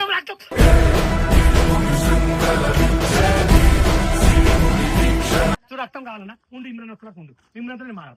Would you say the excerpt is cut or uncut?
cut